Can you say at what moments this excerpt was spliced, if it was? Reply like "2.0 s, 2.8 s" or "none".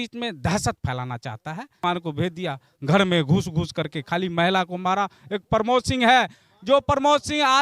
1.8 s